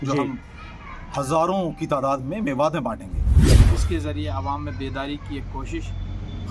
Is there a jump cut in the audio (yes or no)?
yes